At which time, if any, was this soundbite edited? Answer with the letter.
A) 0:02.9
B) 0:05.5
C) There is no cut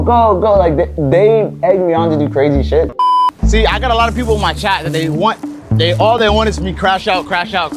A